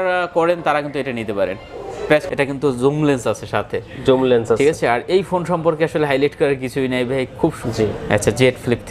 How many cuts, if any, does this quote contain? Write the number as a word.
two